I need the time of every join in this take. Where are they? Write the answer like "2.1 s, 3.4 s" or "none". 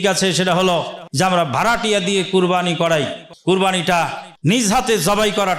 1.0 s, 3.2 s, 4.2 s